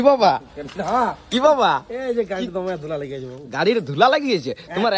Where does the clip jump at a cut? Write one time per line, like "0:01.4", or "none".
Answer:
none